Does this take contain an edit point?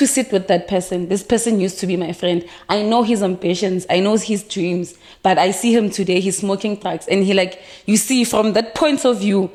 no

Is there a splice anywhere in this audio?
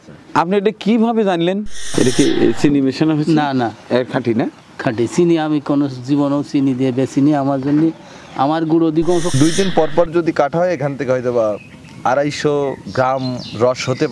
yes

